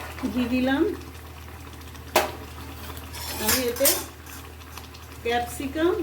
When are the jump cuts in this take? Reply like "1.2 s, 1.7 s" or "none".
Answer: 2.4 s